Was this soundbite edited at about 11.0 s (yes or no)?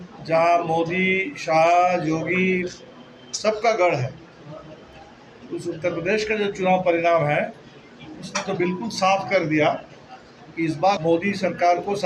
yes